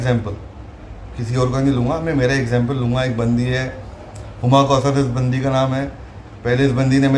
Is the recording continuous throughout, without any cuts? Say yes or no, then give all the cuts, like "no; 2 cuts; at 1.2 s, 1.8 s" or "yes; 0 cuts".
yes; 0 cuts